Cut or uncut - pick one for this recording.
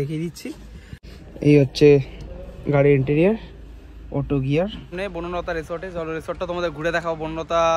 cut